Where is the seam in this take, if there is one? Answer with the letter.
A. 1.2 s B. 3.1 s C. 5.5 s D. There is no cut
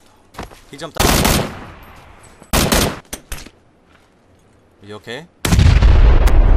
B